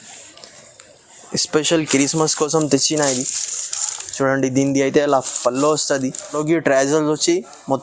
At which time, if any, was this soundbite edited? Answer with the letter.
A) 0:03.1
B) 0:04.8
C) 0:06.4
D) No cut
C